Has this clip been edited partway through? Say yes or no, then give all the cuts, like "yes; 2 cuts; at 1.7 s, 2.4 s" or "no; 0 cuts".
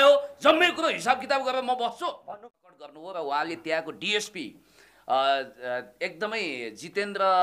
yes; 1 cut; at 2.2 s